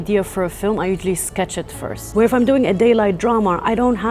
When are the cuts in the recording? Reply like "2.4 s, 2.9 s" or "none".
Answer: 1.9 s